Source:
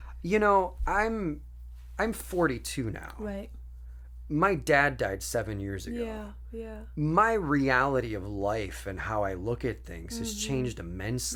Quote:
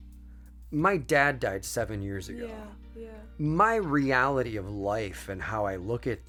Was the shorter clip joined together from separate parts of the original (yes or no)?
no